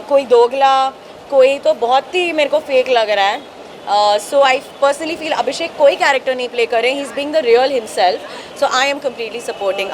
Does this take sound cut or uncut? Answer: uncut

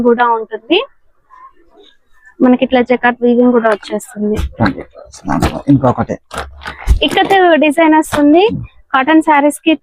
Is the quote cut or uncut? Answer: uncut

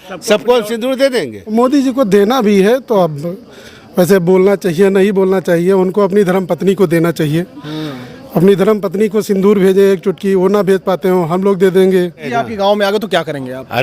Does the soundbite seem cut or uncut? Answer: cut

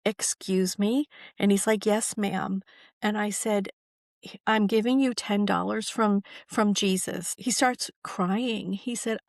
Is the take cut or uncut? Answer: cut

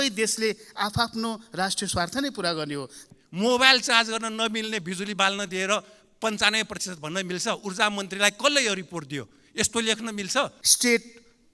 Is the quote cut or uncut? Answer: cut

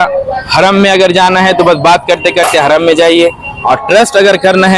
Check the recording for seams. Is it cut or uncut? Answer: cut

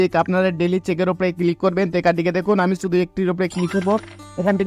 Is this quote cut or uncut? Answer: uncut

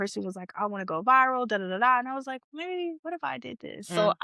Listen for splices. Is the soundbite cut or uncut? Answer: uncut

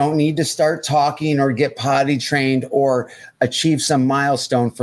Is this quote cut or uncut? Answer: uncut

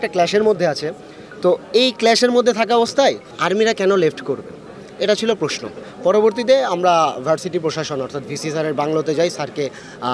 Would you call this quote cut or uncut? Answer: uncut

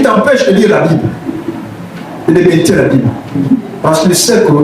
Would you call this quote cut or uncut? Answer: uncut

